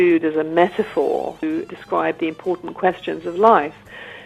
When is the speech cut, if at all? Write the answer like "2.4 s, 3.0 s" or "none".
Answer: 1.5 s